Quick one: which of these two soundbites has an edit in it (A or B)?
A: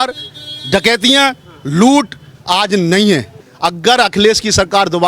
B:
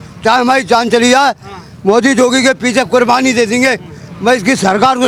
A